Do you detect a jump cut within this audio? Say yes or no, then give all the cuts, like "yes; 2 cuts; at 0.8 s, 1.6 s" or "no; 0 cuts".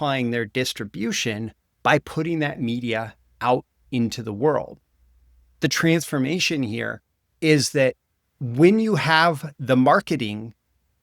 yes; 1 cut; at 5.6 s